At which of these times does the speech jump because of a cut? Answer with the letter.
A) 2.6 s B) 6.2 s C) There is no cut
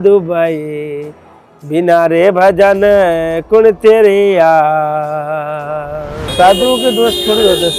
B